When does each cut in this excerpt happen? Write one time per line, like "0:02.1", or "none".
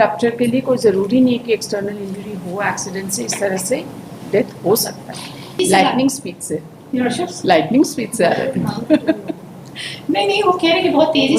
0:05.6